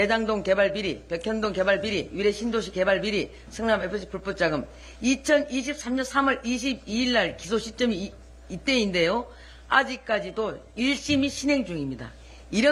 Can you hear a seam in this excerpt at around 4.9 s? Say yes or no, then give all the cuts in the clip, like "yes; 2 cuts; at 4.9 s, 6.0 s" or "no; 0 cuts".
no; 0 cuts